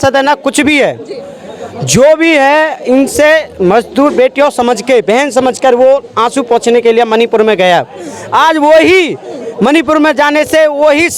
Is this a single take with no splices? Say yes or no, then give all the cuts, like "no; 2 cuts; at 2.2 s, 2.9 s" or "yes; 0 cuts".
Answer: yes; 0 cuts